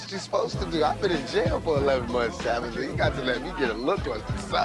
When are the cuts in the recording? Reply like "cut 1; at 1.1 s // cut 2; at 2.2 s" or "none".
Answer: none

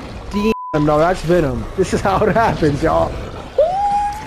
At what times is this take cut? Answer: cut 1; at 1.6 s

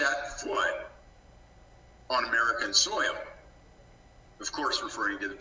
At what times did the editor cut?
none

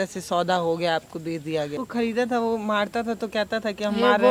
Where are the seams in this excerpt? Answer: cut 1; at 1.7 s

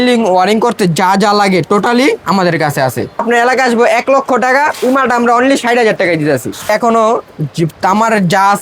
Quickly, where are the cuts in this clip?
cut 1; at 3.2 s // cut 2; at 6.7 s

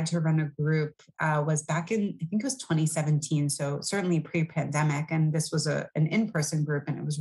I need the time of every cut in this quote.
none

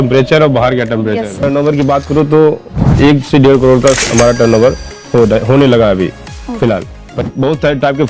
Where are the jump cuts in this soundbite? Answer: cut 1; at 1.4 s // cut 2; at 7.1 s

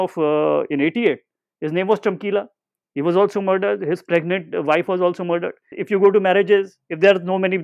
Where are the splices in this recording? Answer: cut 1; at 5.8 s

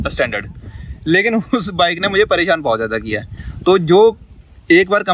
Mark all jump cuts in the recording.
none

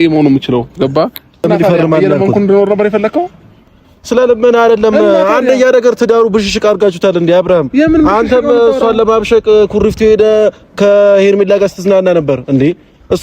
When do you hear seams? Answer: cut 1; at 1.4 s

